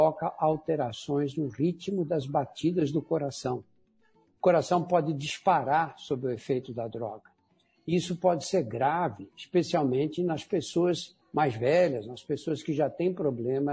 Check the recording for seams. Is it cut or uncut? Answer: uncut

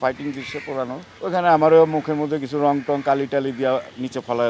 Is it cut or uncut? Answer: cut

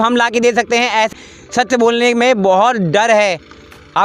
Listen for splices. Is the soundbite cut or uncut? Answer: cut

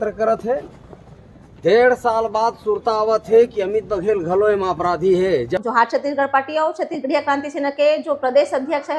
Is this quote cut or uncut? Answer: cut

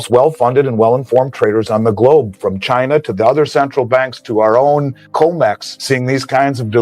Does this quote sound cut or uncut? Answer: cut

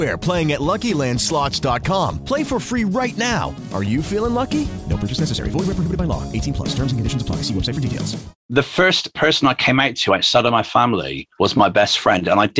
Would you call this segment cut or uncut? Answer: cut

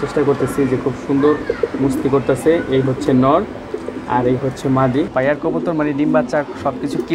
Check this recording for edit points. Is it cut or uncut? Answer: cut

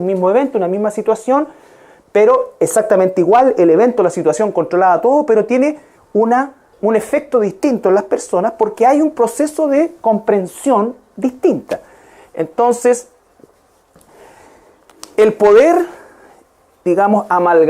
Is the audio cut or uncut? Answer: cut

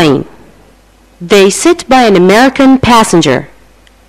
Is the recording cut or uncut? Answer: uncut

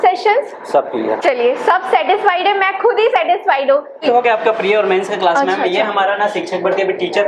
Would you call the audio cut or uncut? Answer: uncut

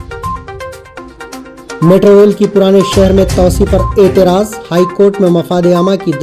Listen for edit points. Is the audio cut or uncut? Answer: cut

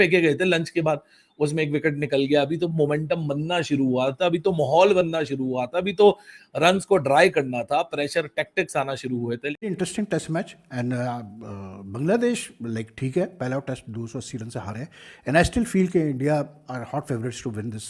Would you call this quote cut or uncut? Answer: cut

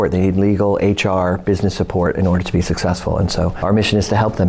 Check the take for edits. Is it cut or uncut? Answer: cut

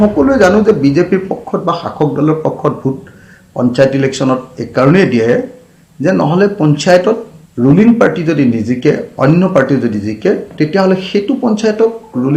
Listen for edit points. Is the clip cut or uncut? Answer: uncut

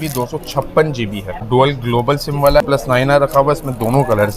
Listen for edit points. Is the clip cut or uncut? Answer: cut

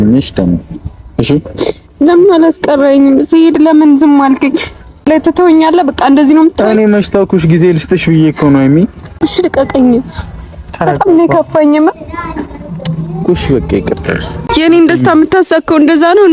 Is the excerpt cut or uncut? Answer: cut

